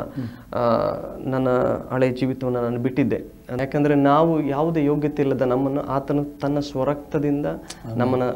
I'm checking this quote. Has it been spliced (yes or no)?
yes